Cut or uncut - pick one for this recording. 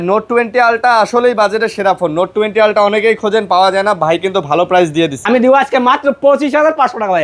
cut